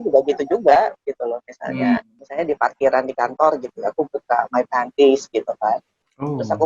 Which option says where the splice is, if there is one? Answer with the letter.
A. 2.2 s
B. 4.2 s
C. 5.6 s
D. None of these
A